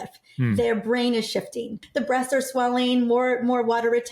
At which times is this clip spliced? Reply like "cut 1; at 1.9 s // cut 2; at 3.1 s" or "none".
cut 1; at 1.8 s